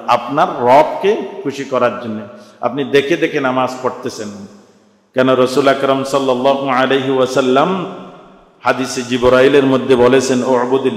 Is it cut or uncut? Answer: uncut